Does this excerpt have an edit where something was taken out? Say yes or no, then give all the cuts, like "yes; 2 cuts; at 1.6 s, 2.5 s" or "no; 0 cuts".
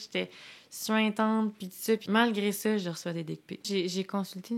yes; 2 cuts; at 2.0 s, 3.7 s